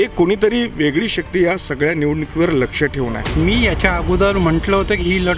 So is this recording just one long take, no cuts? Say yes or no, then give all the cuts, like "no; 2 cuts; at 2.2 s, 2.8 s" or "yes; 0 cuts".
no; 1 cut; at 3.2 s